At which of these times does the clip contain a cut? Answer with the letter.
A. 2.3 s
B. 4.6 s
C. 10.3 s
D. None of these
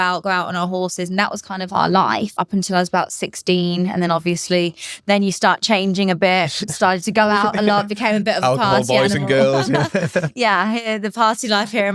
A